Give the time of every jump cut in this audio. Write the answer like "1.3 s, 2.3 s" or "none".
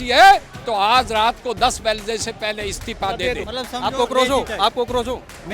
3.5 s

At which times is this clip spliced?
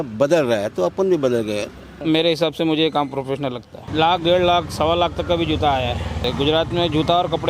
2.0 s, 3.7 s, 6.3 s

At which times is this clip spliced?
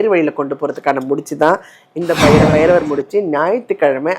2.5 s

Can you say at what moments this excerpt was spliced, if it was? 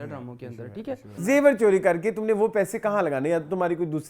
1.1 s

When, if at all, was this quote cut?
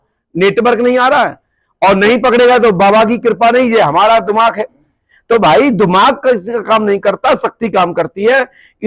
none

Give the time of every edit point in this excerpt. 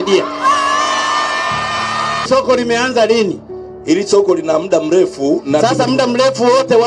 2.2 s

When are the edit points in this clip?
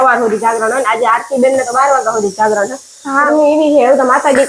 3.3 s

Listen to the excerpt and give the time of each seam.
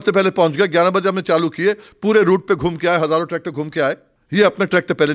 4.1 s

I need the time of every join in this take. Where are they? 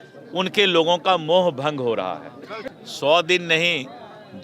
2.6 s

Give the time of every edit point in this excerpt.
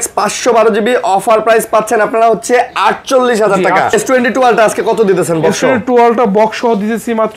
3.9 s

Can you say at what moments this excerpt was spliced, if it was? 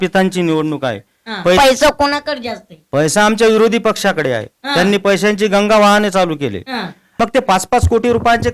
1.6 s, 7.0 s

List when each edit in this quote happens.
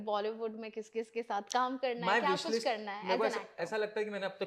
none

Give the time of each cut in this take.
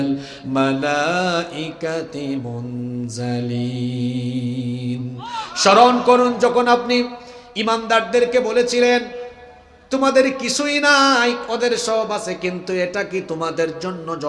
none

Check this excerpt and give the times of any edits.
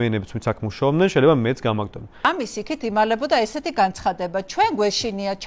2.3 s

